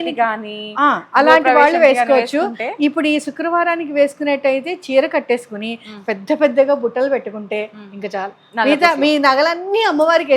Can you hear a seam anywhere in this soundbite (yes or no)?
no